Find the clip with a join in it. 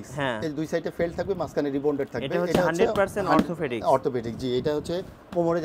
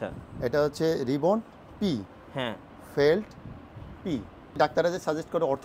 second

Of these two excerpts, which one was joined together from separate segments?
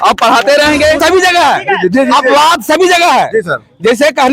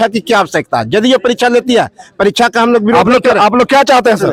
first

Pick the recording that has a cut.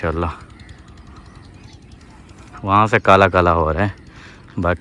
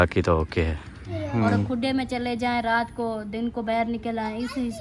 second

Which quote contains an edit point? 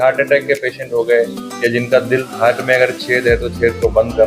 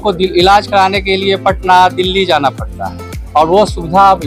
first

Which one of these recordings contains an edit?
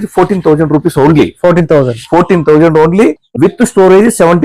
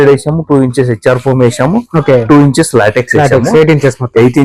first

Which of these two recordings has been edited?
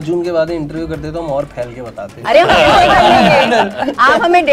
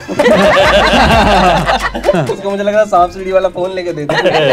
second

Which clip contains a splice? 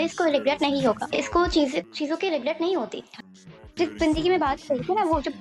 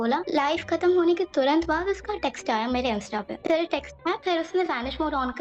first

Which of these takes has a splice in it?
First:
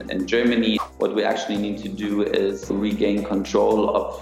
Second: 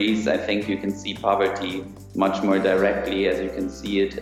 first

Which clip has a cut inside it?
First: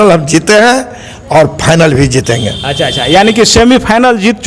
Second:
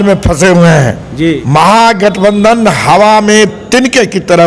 second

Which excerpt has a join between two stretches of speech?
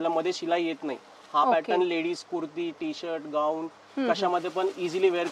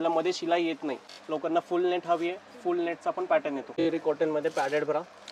second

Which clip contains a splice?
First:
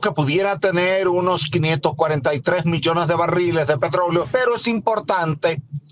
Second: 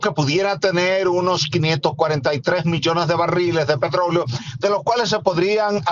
first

